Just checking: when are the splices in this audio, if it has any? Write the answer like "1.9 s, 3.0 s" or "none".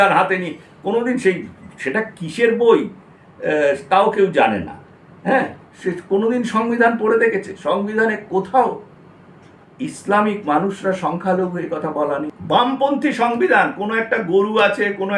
12.3 s